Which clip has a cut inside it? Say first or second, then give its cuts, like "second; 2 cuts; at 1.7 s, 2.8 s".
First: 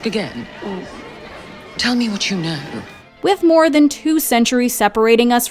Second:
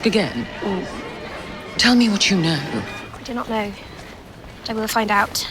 second; 1 cut; at 3.0 s